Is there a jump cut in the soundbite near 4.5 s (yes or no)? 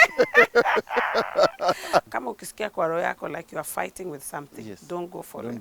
no